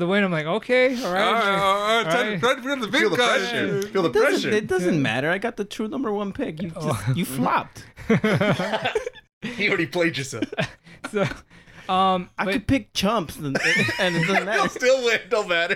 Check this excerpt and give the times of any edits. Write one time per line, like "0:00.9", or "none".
none